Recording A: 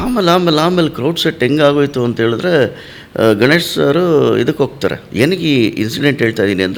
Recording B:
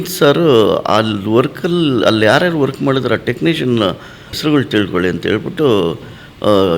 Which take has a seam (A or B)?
B